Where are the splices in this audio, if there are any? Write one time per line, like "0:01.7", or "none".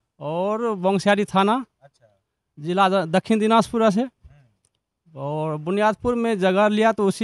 none